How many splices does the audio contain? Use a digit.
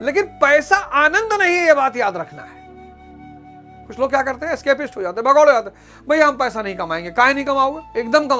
2